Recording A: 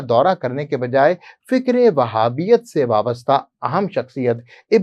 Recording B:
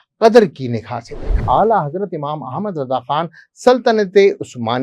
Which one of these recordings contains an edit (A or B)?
B